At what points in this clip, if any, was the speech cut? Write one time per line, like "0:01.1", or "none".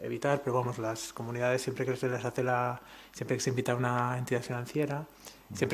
0:01.5